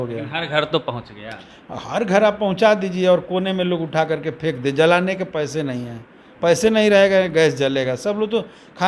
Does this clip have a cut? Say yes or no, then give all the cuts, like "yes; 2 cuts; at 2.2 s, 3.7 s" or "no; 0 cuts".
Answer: no; 0 cuts